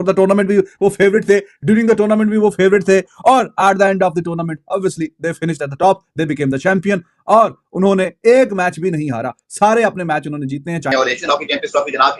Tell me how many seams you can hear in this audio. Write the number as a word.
one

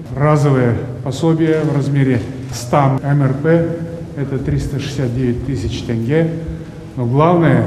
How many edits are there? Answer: zero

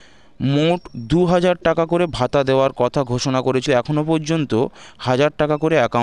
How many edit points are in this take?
one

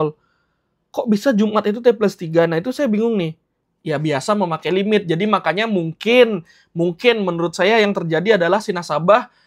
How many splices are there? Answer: one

